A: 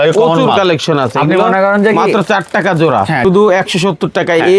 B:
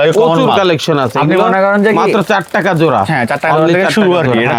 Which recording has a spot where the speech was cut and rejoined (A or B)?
A